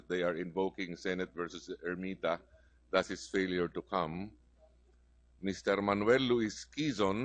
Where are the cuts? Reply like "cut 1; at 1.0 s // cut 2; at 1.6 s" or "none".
cut 1; at 6.2 s

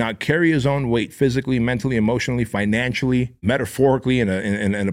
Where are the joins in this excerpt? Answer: cut 1; at 3.4 s

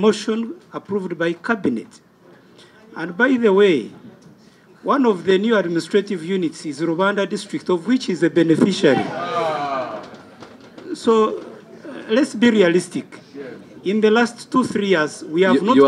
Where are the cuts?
none

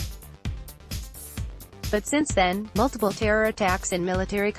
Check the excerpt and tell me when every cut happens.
cut 1; at 1.5 s

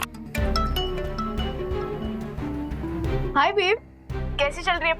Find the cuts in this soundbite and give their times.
cut 1; at 3.3 s

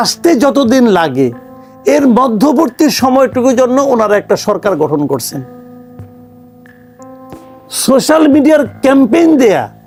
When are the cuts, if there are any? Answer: none

